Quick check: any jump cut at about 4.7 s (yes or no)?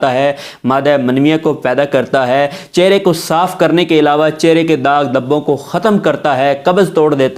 no